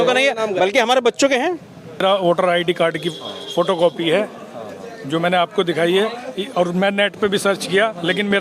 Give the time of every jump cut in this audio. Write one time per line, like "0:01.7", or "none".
0:02.0